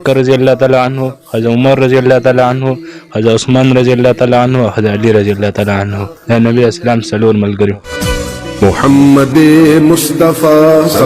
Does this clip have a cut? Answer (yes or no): yes